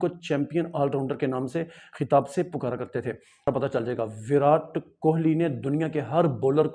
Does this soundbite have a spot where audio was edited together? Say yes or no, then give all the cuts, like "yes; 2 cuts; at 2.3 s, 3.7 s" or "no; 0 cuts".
yes; 1 cut; at 3.5 s